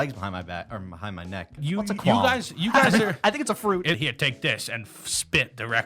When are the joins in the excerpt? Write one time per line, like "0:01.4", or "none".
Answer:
0:01.6
0:04.0